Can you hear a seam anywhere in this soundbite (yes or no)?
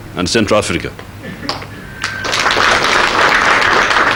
no